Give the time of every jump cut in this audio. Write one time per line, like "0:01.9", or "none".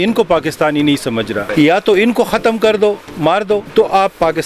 0:01.5
0:03.7